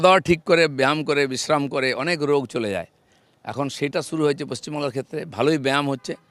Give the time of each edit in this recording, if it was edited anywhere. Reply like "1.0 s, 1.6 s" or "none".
none